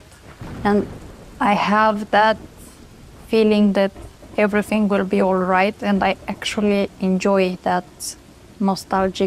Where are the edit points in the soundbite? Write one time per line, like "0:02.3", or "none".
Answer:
none

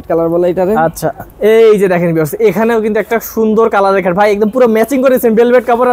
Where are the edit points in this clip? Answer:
0:01.2

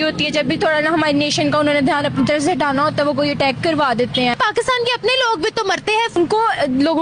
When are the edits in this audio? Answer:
0:04.3
0:06.1

